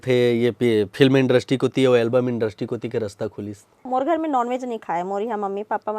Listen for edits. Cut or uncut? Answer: cut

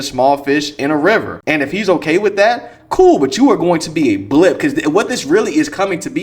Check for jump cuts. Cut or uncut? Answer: cut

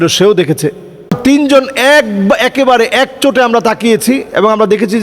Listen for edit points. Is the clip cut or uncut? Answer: cut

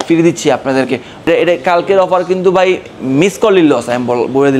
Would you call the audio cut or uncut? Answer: cut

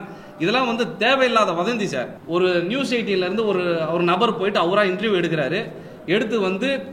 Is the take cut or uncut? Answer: cut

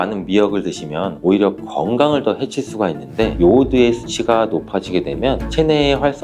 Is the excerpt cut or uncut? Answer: cut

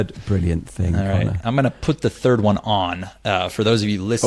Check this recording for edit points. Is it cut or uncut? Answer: uncut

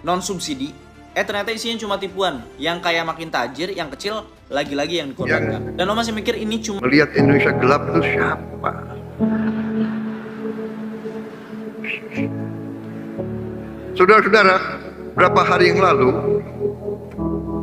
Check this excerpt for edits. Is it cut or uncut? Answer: cut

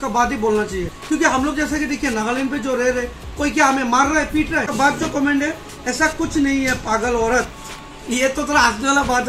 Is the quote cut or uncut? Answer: cut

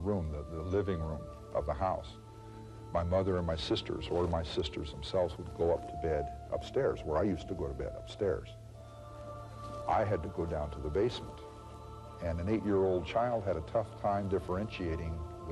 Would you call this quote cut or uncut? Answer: cut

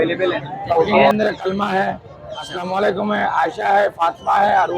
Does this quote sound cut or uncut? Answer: cut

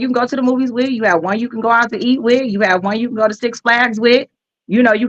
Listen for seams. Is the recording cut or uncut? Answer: uncut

